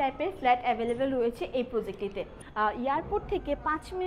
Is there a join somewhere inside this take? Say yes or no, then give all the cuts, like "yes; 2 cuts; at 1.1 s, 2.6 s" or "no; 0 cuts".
yes; 1 cut; at 2.4 s